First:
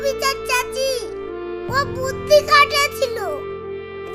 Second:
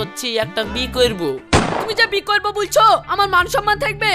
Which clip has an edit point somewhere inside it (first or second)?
second